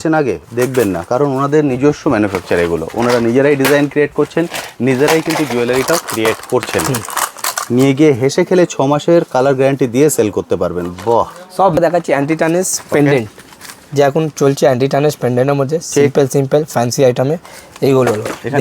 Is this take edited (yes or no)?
yes